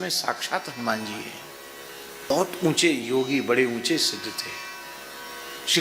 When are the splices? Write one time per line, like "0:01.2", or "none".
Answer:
0:02.3